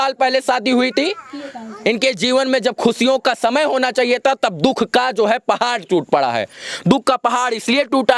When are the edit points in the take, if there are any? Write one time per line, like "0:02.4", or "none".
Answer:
none